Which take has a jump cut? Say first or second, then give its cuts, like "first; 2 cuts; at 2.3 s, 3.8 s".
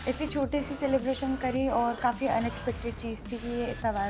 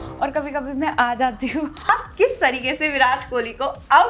second; 1 cut; at 1.9 s